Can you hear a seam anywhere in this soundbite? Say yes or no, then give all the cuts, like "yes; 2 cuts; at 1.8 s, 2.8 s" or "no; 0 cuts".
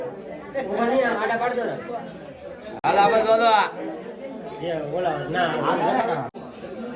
no; 0 cuts